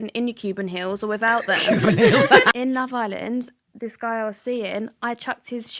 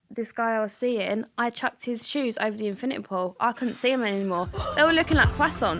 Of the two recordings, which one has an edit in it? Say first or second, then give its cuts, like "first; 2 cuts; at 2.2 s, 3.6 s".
first; 1 cut; at 2.5 s